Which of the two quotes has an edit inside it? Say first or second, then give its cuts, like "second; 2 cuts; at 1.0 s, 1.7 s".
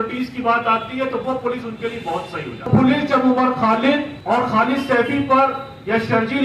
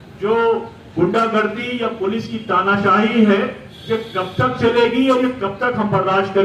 first; 2 cuts; at 2.7 s, 4.1 s